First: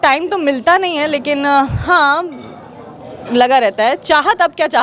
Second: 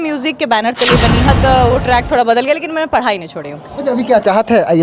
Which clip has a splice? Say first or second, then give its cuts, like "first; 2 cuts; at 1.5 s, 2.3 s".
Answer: second; 1 cut; at 1.3 s